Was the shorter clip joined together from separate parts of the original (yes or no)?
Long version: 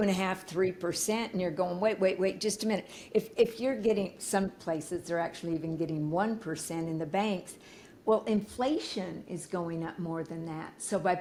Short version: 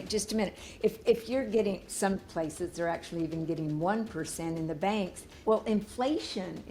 yes